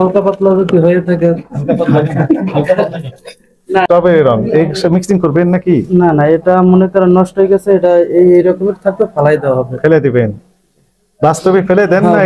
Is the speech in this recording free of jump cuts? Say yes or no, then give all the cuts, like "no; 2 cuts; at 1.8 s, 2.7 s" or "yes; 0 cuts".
no; 1 cut; at 3.9 s